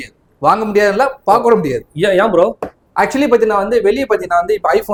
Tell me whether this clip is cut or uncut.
uncut